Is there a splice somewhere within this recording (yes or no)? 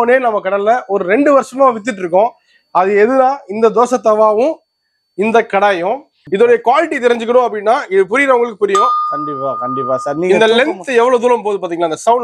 yes